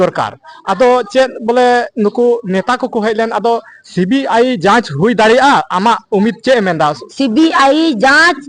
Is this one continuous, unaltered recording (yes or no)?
no